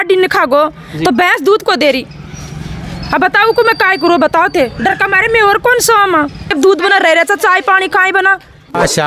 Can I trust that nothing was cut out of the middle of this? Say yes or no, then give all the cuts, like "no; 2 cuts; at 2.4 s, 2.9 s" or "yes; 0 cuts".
yes; 0 cuts